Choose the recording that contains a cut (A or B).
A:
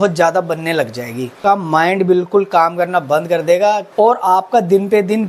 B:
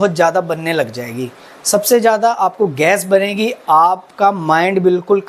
A